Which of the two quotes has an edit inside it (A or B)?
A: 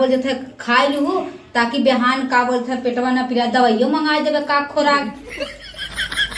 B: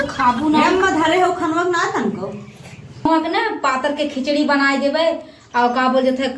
B